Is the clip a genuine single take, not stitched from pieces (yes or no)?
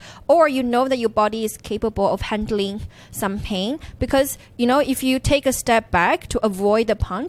yes